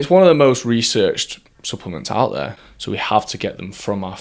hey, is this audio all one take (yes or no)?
no